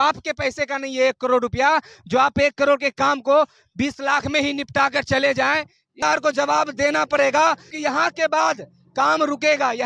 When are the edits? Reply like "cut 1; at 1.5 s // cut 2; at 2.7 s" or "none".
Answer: cut 1; at 6.0 s